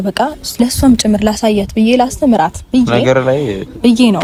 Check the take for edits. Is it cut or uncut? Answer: uncut